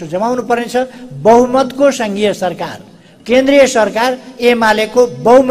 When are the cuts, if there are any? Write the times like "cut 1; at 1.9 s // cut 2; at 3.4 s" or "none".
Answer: none